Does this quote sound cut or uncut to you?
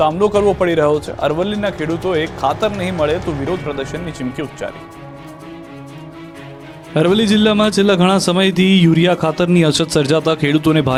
uncut